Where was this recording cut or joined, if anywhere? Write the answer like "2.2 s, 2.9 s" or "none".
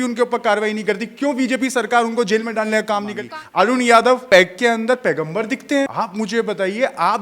3.2 s, 4.2 s, 5.9 s